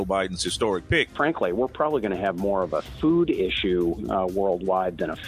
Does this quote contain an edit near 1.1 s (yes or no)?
yes